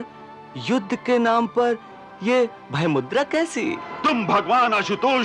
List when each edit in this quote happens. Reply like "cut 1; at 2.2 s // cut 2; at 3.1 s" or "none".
cut 1; at 3.9 s